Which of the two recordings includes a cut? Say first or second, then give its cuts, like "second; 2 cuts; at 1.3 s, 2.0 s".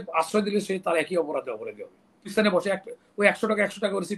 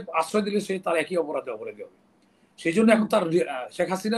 first; 1 cut; at 2.3 s